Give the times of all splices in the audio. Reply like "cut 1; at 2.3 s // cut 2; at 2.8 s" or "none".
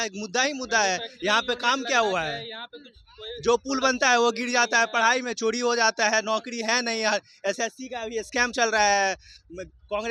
none